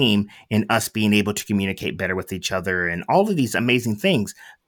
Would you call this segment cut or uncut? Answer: uncut